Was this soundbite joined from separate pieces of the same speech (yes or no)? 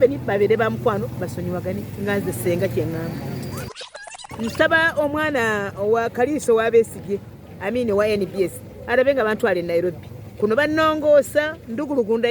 yes